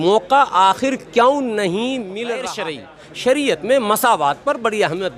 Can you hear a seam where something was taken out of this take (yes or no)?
yes